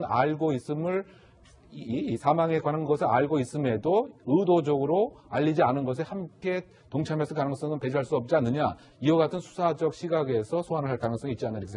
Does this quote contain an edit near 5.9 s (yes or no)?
yes